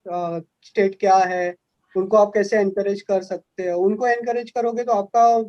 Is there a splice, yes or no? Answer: no